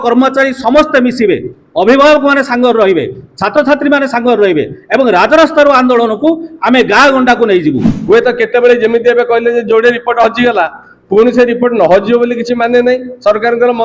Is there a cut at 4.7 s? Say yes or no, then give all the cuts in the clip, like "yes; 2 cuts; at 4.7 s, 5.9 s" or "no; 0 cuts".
no; 1 cut; at 7.9 s